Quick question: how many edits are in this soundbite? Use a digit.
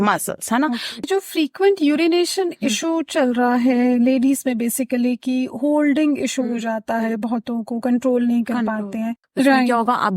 2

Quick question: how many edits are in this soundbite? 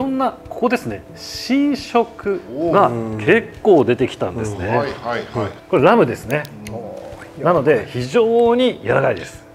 1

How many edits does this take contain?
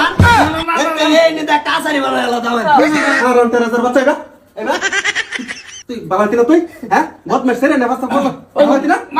1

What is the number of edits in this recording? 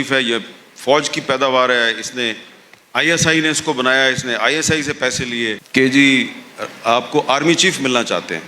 1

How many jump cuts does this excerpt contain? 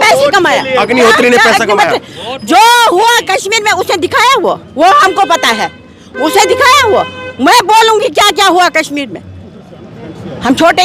0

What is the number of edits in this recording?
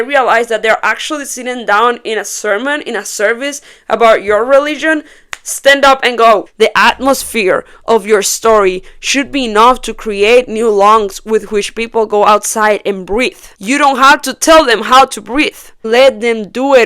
2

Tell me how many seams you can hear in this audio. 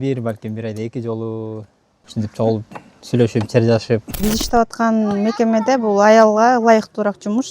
1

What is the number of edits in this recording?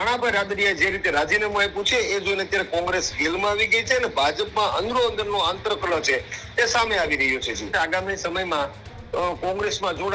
1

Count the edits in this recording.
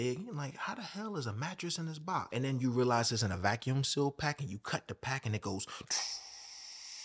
1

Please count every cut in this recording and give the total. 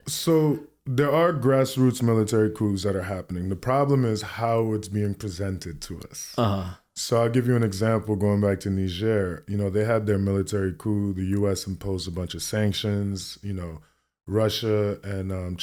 0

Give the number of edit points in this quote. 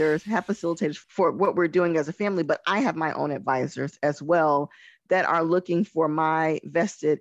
1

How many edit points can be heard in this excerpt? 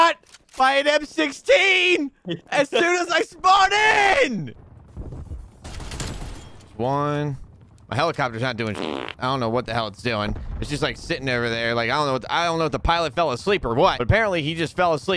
1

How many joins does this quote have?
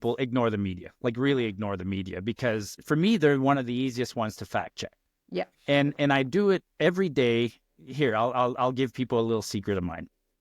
1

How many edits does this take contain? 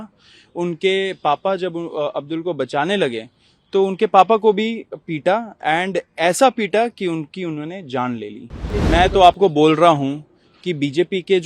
1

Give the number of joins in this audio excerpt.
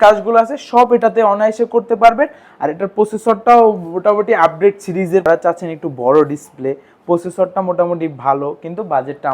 1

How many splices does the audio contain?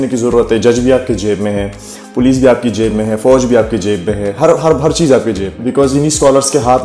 1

